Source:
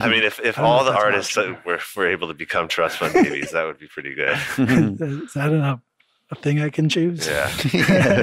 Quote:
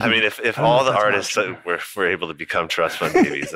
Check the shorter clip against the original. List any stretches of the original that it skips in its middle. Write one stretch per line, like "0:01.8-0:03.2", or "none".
none